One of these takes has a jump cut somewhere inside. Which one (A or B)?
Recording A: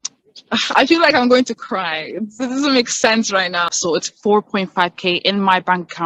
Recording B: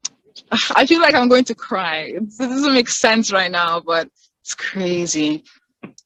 A